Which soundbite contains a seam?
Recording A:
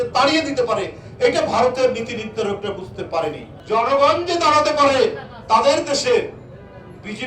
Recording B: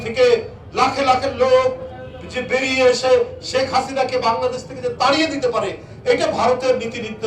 A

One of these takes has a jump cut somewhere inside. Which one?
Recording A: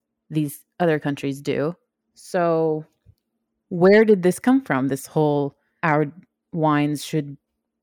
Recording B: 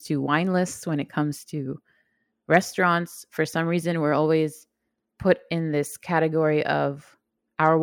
A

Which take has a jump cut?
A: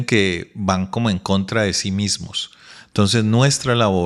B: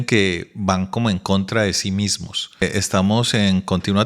B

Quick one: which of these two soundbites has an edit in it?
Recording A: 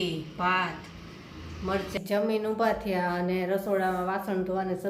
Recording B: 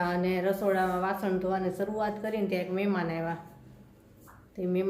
A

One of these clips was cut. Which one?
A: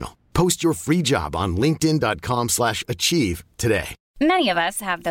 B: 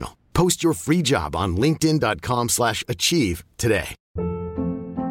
B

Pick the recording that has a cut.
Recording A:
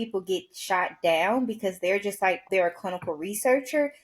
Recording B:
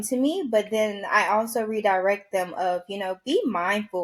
A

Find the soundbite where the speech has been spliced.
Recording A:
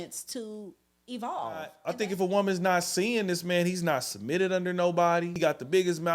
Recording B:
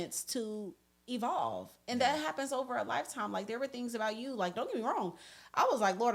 A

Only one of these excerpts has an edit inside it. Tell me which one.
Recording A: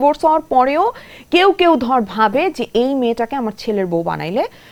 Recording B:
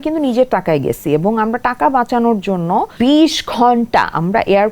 B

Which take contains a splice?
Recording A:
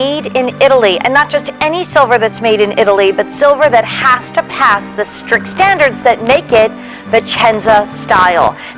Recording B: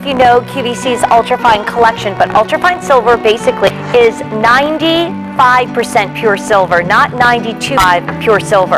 B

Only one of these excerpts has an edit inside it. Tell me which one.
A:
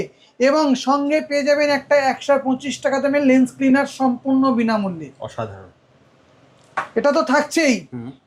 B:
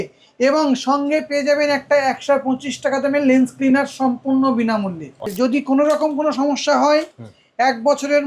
B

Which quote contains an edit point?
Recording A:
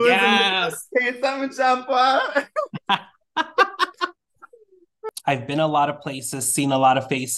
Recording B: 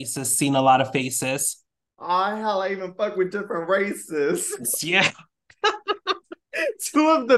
A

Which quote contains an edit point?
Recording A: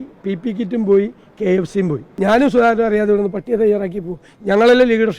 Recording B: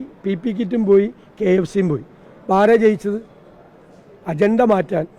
A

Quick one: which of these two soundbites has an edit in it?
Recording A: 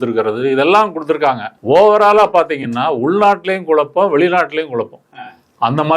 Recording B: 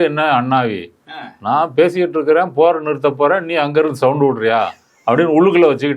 A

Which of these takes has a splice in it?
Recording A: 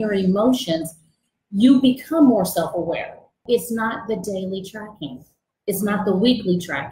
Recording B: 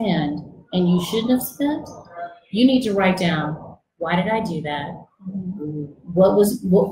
A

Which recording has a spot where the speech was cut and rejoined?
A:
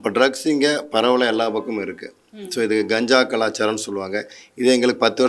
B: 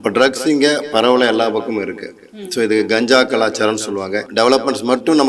B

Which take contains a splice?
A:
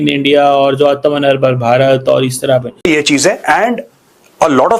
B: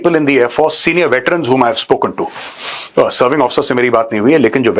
A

